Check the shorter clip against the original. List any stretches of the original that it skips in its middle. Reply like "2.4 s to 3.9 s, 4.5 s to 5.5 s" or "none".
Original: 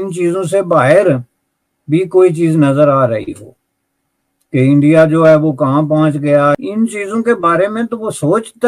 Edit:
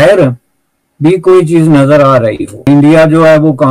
3.5 s to 4.7 s